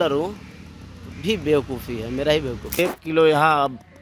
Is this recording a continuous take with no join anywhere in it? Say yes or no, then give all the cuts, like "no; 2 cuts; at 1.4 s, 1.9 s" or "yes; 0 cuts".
no; 1 cut; at 2.8 s